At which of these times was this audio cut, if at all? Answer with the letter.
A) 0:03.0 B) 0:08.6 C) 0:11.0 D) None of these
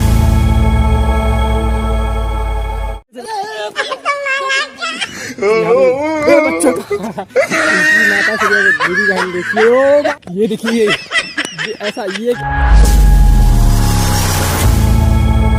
D